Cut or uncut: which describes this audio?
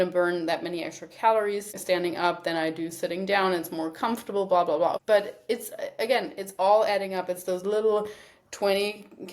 cut